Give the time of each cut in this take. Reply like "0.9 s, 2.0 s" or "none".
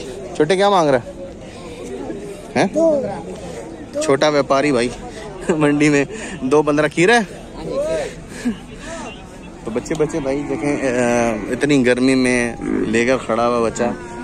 none